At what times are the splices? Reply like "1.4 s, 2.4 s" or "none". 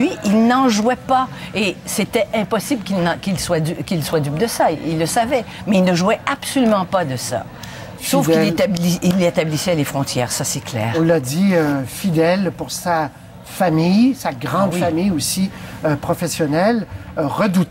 8.4 s